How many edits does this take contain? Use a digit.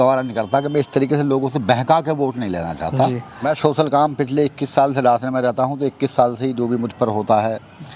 1